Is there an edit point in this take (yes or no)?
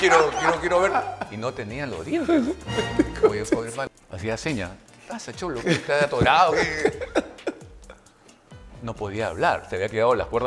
yes